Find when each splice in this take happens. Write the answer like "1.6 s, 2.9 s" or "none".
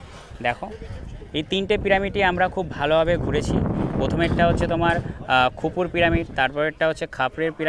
none